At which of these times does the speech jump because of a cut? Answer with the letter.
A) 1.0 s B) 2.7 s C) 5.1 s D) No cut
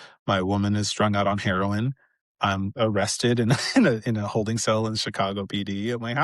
B